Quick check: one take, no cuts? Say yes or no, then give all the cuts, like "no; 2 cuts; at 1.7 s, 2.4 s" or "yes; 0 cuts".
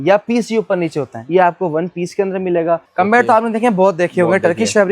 no; 2 cuts; at 1.2 s, 2.9 s